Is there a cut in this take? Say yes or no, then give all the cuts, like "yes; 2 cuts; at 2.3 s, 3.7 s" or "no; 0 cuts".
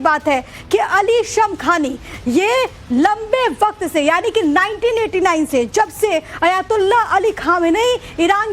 yes; 1 cut; at 7.6 s